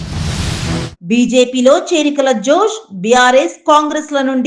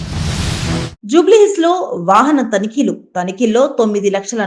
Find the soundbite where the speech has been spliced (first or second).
first